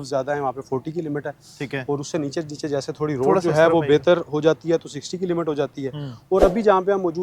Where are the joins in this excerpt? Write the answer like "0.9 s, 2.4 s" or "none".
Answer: none